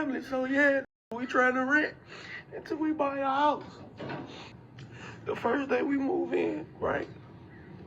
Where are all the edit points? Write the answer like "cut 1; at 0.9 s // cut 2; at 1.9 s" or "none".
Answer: cut 1; at 4.6 s